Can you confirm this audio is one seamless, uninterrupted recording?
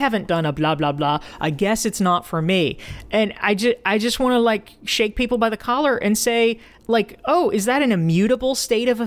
yes; 0 cuts

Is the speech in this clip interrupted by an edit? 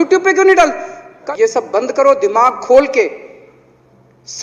yes; 1 cut; at 1.1 s

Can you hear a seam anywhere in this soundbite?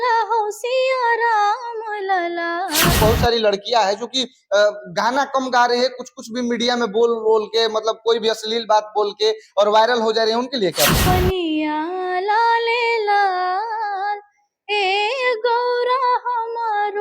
yes; 2 cuts; at 2.9 s, 11.0 s

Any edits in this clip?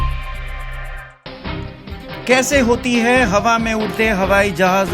no; 0 cuts

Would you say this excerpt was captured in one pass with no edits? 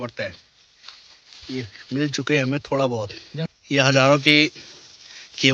no; 1 cut; at 3.3 s

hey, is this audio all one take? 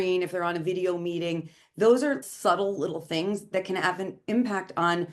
no; 1 cut; at 2.2 s

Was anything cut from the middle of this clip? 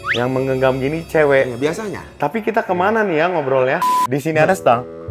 yes; 1 cut; at 3.9 s

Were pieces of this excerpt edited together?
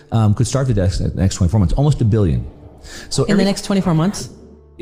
no; 0 cuts

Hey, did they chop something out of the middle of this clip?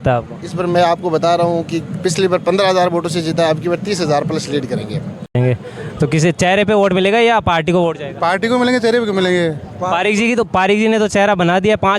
yes; 1 cut; at 5.3 s

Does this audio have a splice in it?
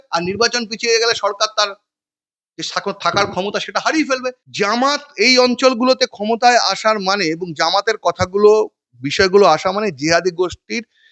yes; 1 cut; at 4.4 s

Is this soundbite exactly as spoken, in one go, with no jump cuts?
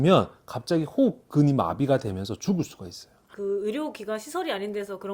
yes; 0 cuts

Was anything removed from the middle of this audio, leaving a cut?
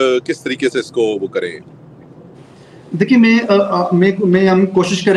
no; 0 cuts

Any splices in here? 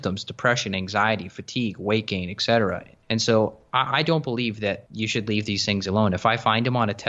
yes; 2 cuts; at 2.9 s, 4.9 s

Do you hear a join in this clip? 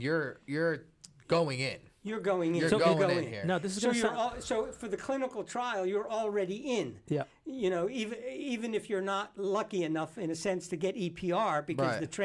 no; 0 cuts

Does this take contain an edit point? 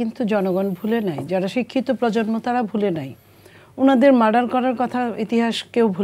no; 0 cuts

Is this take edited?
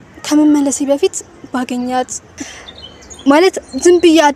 yes; 1 cut; at 2.4 s

